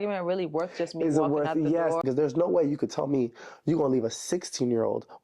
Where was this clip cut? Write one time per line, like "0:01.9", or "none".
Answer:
0:02.0